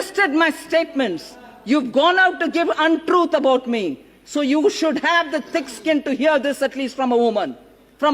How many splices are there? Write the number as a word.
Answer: zero